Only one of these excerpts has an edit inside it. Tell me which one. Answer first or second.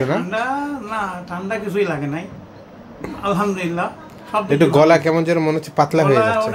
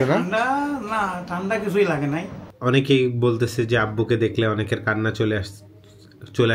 second